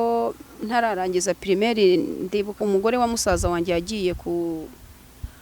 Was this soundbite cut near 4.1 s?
no; 1 cut; at 2.6 s

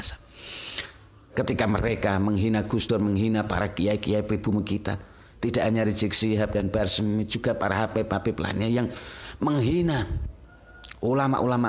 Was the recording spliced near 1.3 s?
yes; 1 cut; at 1.3 s

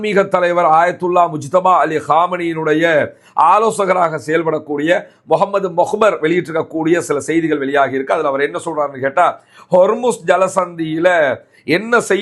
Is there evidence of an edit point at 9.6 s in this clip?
no; 0 cuts

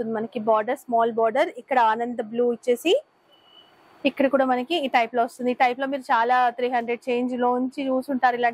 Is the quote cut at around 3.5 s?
no; 0 cuts

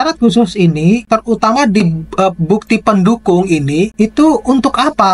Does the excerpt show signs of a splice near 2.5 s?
no; 2 cuts; at 1.0 s, 3.9 s

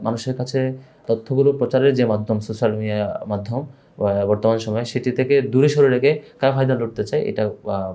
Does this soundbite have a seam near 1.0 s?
yes; 1 cut; at 1.0 s

